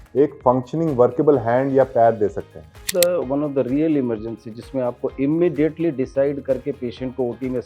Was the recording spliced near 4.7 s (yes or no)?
no